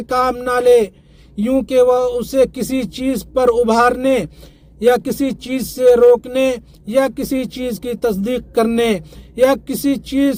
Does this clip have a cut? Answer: no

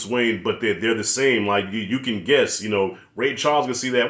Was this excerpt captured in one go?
yes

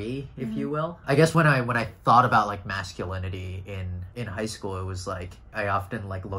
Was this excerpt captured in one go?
no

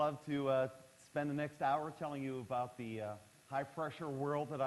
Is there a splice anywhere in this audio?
yes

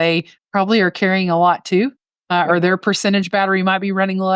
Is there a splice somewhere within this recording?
no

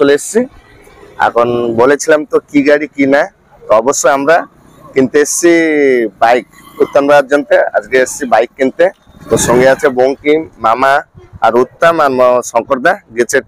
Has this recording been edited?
no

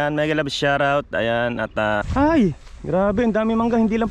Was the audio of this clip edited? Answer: yes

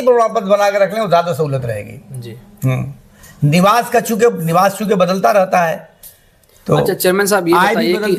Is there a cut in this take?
no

